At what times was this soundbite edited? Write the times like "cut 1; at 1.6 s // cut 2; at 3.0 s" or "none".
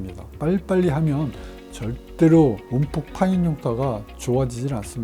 none

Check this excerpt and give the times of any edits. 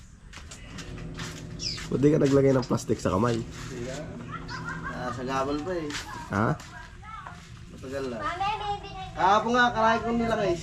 none

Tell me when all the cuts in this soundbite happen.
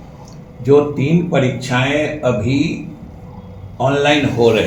none

